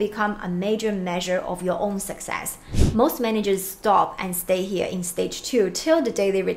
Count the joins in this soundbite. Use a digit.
0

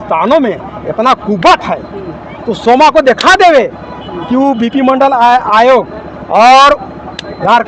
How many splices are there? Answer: 0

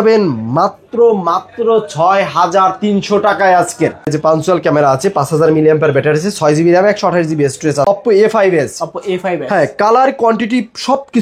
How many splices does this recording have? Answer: 2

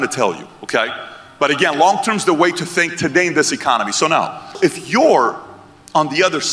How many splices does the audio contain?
1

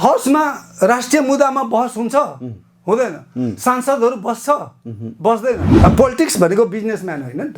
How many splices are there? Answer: 1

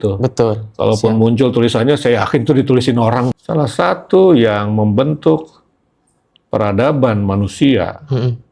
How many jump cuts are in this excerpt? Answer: 1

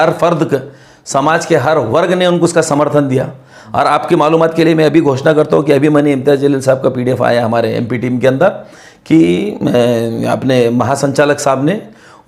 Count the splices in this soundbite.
0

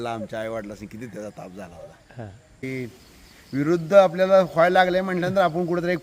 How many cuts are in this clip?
1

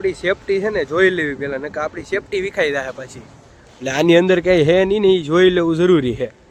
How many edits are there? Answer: 0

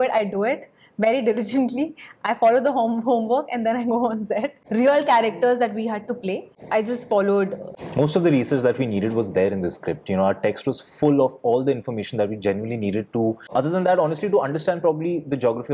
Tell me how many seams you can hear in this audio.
4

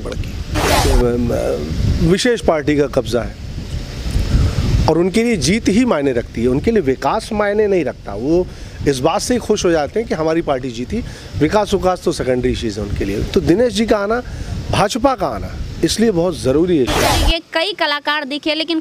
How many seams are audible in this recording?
2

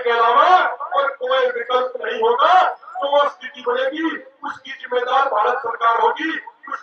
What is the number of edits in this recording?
0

